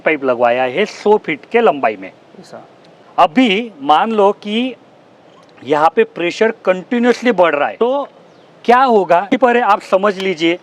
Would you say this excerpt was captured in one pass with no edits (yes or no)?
no